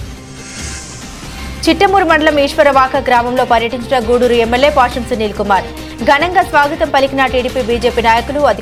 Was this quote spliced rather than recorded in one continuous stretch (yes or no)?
no